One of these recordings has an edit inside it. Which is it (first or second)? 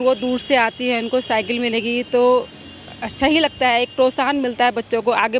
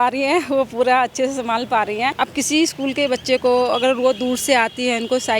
second